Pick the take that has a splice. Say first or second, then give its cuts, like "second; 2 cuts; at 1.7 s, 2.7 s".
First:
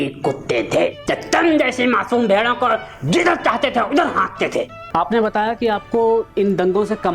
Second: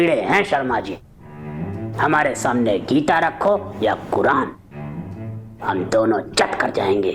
first; 2 cuts; at 1.0 s, 4.8 s